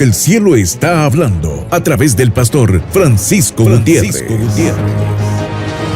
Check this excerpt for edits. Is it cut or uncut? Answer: cut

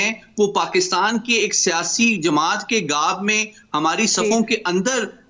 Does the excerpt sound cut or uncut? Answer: uncut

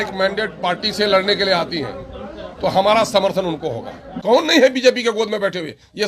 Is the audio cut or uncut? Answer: cut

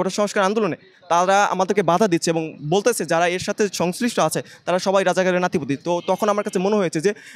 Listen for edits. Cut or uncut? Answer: uncut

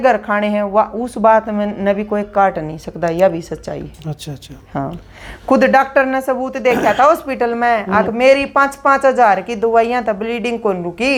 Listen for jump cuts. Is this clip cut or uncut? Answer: uncut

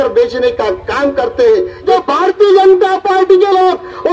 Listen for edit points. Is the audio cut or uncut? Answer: cut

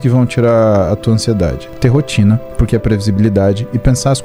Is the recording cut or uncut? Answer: cut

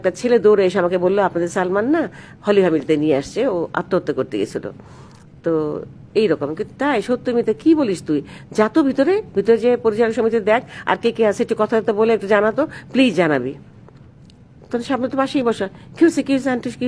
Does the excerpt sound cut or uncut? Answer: uncut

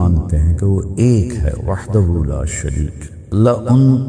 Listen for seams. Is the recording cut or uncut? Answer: cut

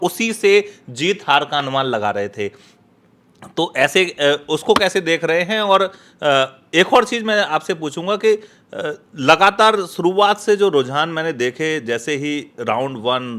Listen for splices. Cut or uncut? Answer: uncut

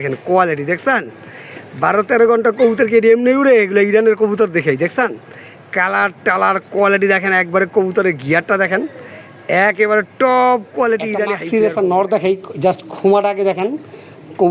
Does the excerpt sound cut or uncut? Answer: cut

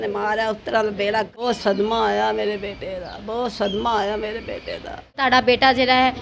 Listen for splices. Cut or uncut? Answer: cut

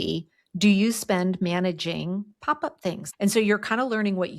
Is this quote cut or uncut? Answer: cut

